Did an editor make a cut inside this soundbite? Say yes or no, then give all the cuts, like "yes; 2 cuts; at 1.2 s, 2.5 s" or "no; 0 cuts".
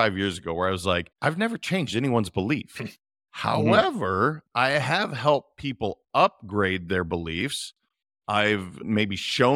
yes; 2 cuts; at 1.1 s, 8.8 s